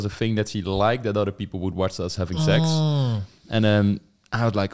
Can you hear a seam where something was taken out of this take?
no; 0 cuts

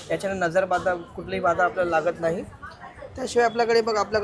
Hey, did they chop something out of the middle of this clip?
no; 0 cuts

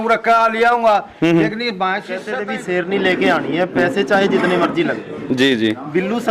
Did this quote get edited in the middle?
yes; 1 cut; at 2.3 s

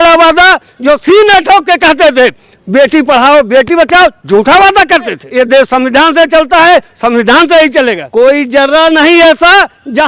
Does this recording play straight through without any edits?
no; 2 cuts; at 5.2 s, 8.0 s

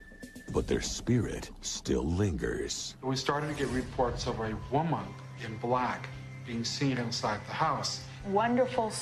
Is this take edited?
yes; 1 cut; at 1.3 s

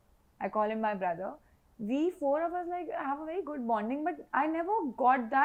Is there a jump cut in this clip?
no; 0 cuts

